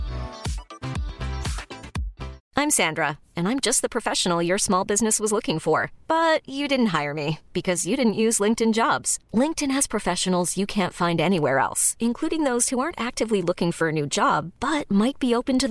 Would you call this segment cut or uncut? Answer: cut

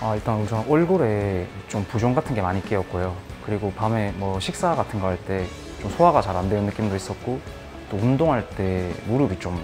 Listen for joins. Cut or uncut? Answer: uncut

